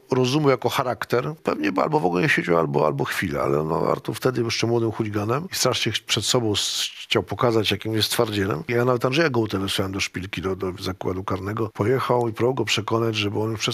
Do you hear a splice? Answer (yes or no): yes